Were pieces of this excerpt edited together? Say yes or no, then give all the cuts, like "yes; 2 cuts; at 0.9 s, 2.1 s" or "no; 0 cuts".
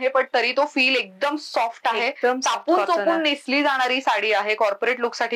no; 0 cuts